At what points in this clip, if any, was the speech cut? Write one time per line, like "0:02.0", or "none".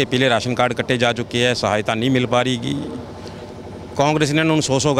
none